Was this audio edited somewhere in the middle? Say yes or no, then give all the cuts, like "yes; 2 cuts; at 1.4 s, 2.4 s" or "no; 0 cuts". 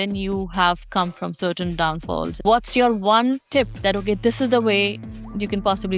yes; 2 cuts; at 2.4 s, 3.7 s